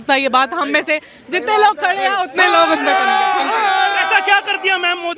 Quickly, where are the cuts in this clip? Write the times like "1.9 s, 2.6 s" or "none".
none